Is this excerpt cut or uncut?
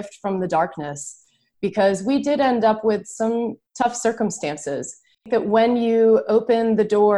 cut